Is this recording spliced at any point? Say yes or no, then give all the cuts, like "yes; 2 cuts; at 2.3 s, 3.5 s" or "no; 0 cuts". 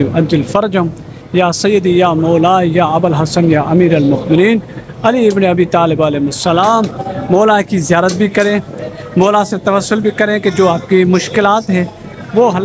no; 0 cuts